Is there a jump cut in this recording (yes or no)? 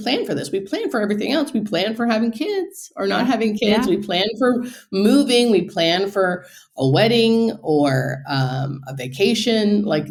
no